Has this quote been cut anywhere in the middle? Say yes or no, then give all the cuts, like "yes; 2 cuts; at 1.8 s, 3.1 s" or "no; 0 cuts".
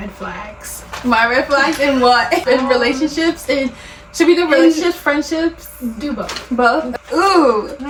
no; 0 cuts